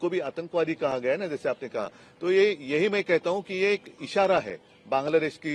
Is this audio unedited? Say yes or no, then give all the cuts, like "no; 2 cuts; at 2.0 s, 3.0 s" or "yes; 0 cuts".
yes; 0 cuts